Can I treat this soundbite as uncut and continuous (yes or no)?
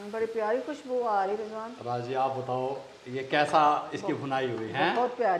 yes